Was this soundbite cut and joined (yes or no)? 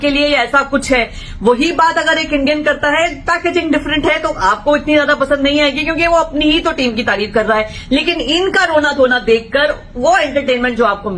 no